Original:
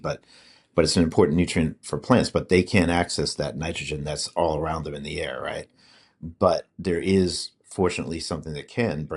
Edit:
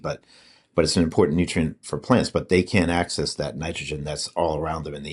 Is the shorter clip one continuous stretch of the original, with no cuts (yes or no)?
yes